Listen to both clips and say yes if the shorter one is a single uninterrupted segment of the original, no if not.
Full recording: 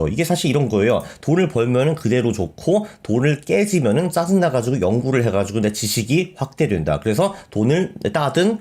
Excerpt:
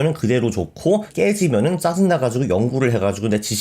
no